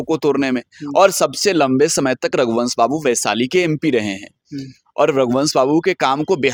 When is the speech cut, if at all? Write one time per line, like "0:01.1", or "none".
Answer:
none